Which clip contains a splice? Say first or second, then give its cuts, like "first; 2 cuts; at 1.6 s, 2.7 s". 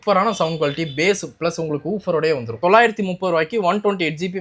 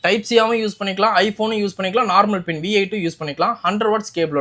first; 1 cut; at 2.5 s